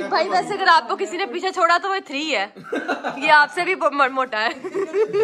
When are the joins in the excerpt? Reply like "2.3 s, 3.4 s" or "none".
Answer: none